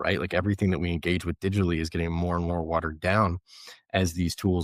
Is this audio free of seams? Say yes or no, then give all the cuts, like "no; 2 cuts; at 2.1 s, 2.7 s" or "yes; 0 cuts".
yes; 0 cuts